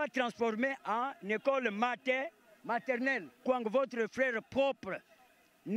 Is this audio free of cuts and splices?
no; 1 cut; at 3.4 s

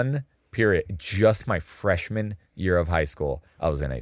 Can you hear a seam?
no; 0 cuts

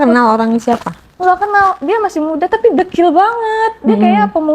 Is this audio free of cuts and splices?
yes; 0 cuts

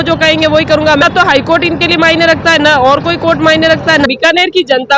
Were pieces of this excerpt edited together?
yes; 2 cuts; at 1.0 s, 4.1 s

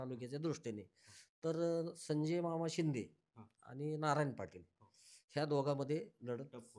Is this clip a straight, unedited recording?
yes; 0 cuts

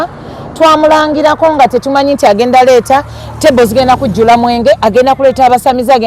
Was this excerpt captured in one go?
yes; 0 cuts

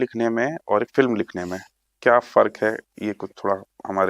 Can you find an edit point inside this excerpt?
no; 0 cuts

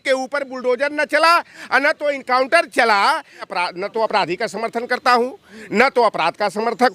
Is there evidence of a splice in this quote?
yes; 1 cut; at 3.5 s

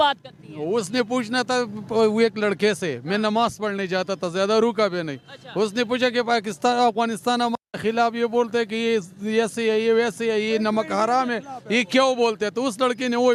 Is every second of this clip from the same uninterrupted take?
yes; 0 cuts

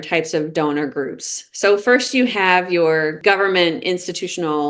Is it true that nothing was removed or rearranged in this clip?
yes; 0 cuts

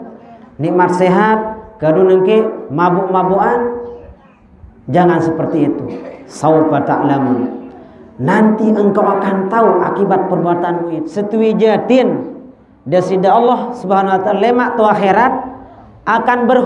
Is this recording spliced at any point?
yes; 1 cut; at 11.0 s

